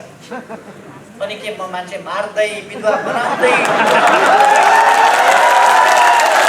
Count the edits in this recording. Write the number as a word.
zero